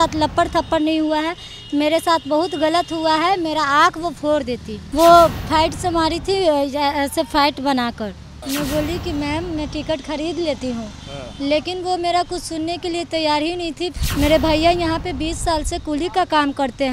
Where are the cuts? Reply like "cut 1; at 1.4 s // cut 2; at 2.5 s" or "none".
cut 1; at 4.8 s // cut 2; at 8.3 s // cut 3; at 14.0 s